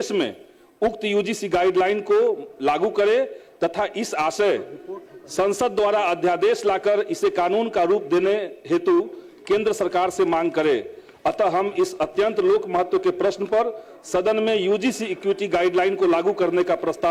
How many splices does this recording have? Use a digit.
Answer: 0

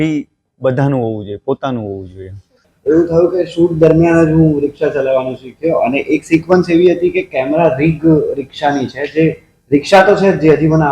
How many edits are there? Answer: 1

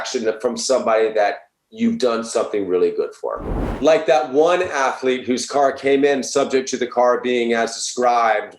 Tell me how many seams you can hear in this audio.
1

